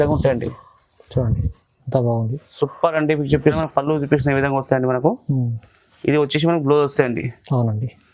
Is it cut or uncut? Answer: cut